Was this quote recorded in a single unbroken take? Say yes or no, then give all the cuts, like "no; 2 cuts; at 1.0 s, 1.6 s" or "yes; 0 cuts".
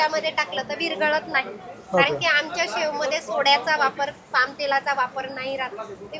yes; 0 cuts